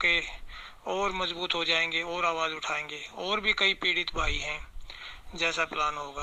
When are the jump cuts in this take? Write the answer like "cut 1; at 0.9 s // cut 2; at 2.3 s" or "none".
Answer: none